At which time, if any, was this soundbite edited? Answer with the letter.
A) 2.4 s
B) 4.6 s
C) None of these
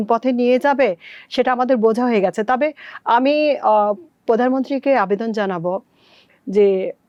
C